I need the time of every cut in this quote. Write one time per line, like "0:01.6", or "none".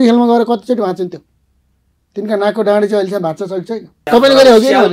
0:04.0